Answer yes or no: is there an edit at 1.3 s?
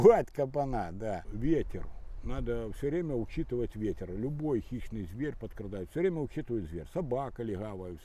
yes